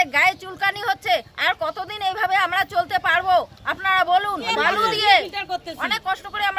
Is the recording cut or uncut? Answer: cut